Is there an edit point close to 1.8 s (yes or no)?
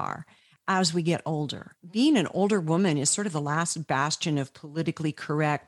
yes